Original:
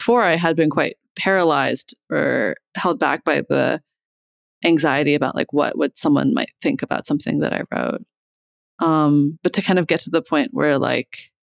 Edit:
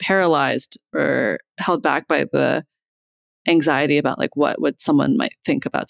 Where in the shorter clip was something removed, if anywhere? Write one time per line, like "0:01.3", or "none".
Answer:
none

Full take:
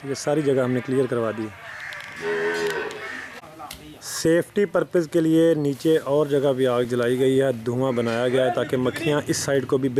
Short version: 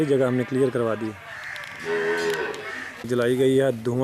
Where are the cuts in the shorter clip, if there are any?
0:03.1

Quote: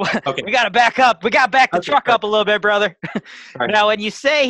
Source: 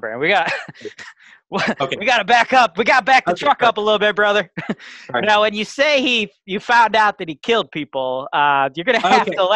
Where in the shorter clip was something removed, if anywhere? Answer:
none

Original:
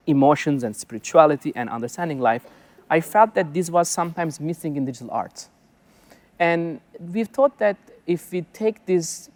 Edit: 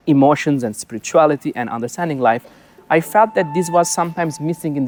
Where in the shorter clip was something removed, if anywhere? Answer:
none

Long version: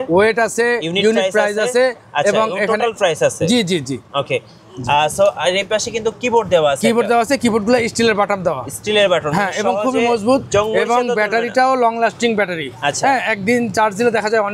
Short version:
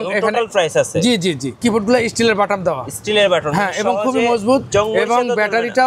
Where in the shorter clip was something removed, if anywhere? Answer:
0:01.6

